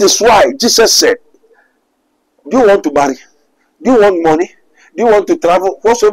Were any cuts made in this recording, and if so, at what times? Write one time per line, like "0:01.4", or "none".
none